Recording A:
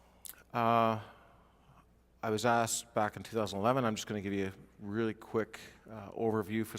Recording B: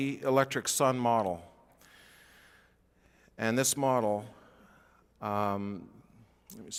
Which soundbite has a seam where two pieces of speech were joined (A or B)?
A